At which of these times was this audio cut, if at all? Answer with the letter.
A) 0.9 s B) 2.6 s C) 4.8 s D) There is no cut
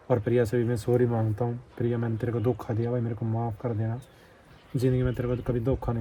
D